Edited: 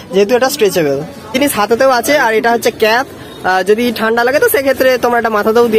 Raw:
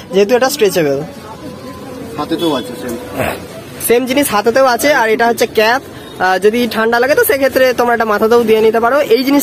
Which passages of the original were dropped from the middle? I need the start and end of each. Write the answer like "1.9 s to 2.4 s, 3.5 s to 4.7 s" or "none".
1.3 s to 4.1 s

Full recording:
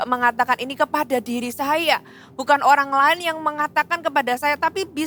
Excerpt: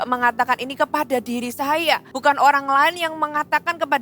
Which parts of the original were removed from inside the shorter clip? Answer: 2.1 s to 2.3 s

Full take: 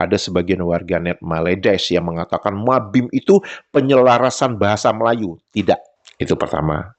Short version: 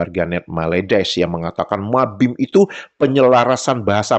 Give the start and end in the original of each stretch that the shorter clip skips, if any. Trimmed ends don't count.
none

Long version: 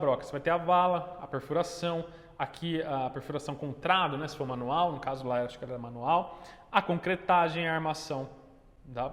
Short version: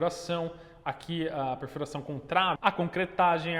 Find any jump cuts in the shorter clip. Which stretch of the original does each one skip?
4.1 s to 6.7 s

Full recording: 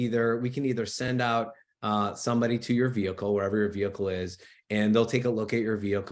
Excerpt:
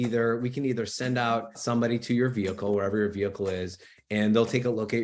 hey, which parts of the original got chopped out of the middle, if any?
1.1 s to 1.7 s

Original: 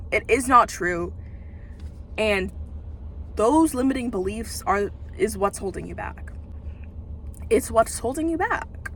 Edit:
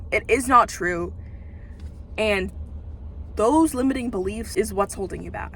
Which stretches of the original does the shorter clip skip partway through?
4.4 s to 5.1 s

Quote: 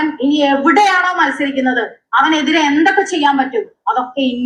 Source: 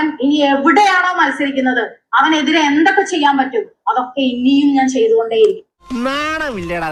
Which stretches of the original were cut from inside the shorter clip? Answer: none

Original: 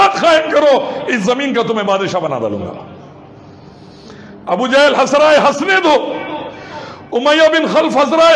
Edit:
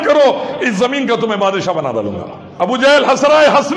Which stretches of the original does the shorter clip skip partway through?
2.9 s to 4.3 s

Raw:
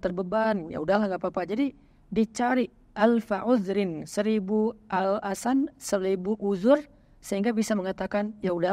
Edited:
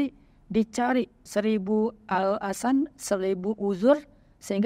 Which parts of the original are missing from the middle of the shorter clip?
2.8 s to 4.0 s

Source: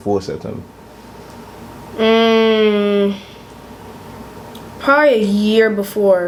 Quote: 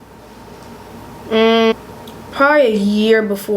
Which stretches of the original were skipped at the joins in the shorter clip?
2.4 s to 4.2 s

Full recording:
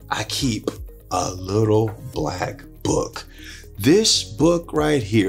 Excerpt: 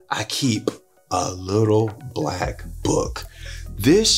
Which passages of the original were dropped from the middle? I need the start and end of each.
none

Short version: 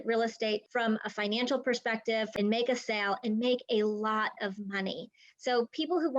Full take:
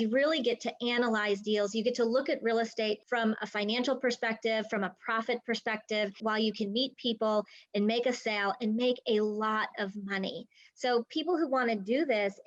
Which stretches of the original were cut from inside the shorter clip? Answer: 4.7 s to 7.7 s

